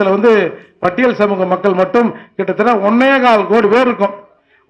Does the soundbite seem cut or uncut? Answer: uncut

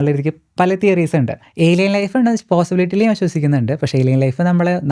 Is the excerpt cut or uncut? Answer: cut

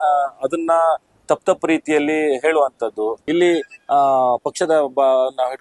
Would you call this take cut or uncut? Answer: cut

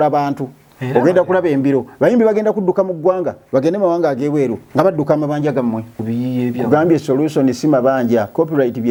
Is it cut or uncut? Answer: uncut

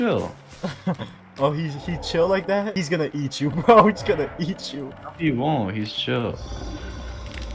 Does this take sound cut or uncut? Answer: uncut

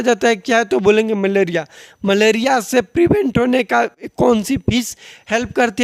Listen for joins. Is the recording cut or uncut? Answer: uncut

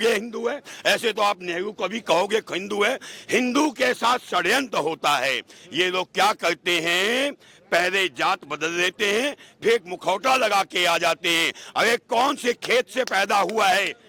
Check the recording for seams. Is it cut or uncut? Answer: uncut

